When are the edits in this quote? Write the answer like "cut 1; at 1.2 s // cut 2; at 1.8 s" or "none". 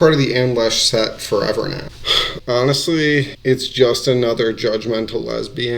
cut 1; at 2.3 s